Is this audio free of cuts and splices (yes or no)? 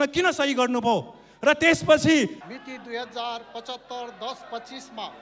no